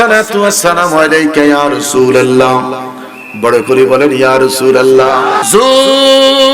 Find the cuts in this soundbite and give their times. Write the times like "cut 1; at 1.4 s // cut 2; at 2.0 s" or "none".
cut 1; at 5.4 s